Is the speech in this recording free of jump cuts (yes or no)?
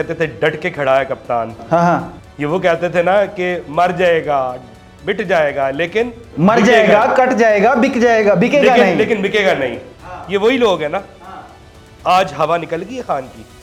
yes